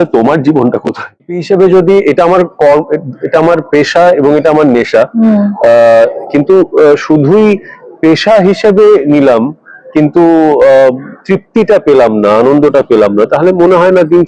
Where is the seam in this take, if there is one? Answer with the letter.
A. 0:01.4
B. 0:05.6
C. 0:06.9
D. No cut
A